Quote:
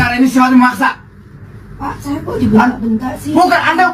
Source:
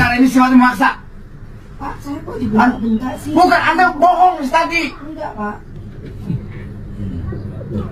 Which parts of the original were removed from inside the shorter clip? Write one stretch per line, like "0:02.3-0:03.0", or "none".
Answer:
none